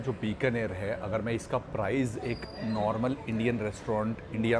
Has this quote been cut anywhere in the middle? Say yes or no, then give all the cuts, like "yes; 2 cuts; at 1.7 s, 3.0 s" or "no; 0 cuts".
no; 0 cuts